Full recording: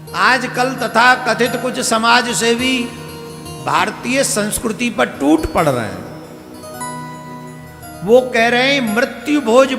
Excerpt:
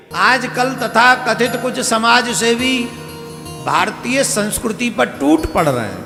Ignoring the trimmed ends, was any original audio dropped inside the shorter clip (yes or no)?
no